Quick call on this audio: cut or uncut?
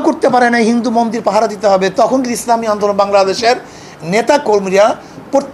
uncut